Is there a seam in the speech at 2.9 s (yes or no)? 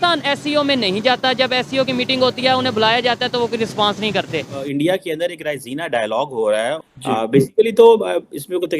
no